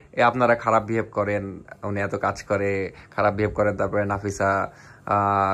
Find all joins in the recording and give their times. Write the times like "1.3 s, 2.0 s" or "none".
none